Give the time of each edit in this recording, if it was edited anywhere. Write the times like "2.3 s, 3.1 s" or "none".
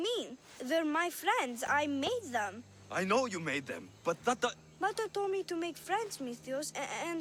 none